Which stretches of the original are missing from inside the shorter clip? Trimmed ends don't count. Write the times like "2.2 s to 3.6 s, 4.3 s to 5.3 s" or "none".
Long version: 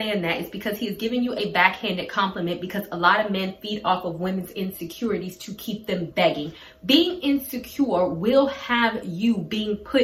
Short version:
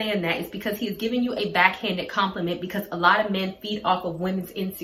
none